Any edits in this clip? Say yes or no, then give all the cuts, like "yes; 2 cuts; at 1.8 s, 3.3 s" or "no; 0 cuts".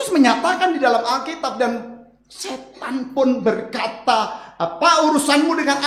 no; 0 cuts